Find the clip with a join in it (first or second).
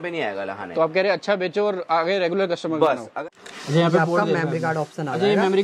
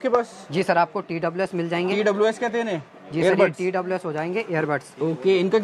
first